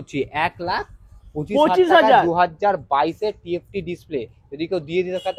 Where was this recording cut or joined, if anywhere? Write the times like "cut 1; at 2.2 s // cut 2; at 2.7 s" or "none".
none